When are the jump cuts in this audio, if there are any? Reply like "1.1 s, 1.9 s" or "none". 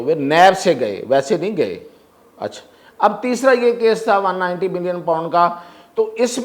none